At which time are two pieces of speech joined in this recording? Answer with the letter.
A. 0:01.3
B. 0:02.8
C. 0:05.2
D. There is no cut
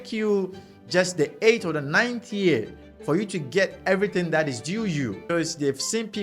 C